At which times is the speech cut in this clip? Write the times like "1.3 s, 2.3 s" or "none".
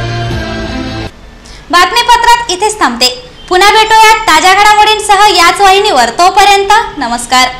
none